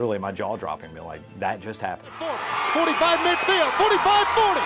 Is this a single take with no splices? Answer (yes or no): no